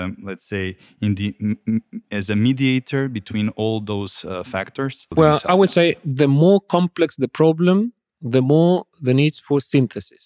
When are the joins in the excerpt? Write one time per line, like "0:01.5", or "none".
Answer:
0:05.0